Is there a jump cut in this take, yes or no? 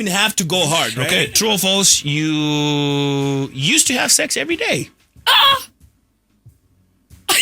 yes